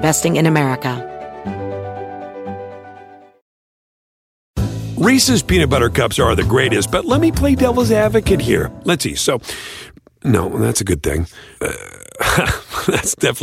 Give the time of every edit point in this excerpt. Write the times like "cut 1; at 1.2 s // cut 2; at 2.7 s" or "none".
cut 1; at 1.0 s